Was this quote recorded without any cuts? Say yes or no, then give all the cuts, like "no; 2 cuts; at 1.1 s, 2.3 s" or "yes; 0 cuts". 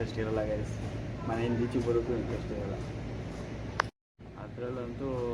yes; 0 cuts